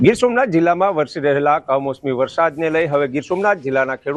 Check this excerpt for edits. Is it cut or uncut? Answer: uncut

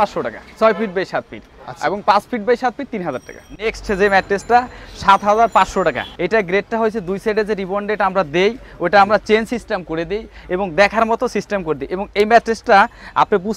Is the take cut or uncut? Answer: uncut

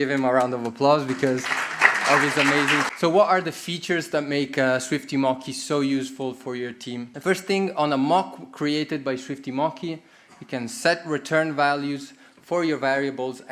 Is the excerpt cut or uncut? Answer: cut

